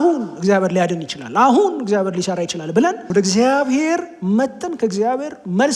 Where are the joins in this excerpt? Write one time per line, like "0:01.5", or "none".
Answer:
0:03.1

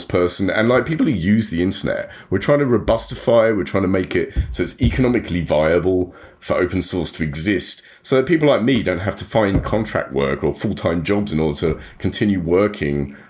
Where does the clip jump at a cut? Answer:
0:11.3

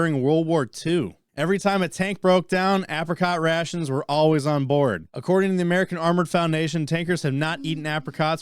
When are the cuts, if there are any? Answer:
0:01.2
0:05.1

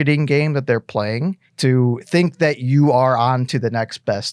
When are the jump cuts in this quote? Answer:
0:01.5

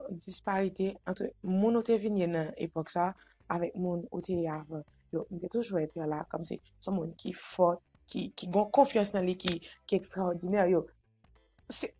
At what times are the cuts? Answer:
none

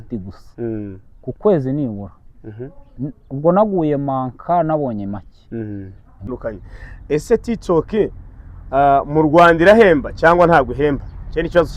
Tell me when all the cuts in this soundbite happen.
0:06.3

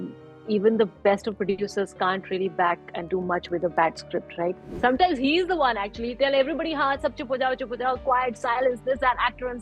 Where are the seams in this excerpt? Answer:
0:04.7

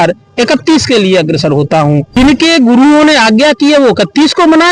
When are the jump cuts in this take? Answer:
0:02.1

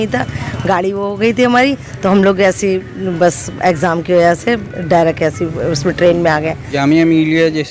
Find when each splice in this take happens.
0:06.7

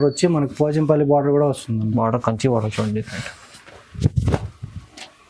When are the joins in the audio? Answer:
none

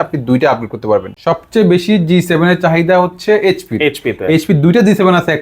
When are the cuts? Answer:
0:01.1

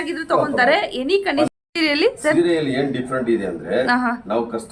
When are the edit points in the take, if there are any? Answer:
0:01.3

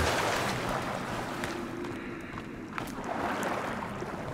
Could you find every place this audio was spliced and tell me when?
none

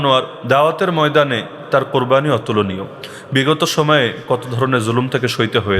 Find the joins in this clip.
none

